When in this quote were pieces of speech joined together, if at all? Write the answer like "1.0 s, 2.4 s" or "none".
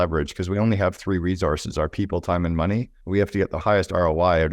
3.4 s